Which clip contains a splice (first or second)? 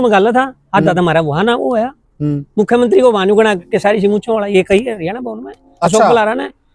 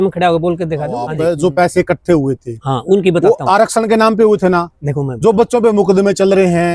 second